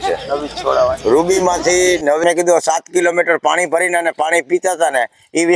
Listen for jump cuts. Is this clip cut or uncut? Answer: cut